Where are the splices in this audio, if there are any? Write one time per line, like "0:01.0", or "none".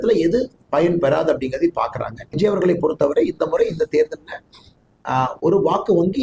0:02.3